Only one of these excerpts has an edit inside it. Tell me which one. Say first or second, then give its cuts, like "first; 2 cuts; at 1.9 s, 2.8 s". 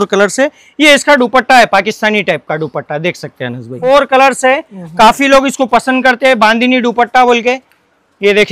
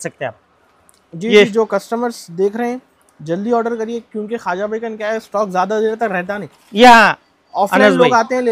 first; 1 cut; at 3.8 s